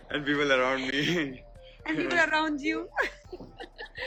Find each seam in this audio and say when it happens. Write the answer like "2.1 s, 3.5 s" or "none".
none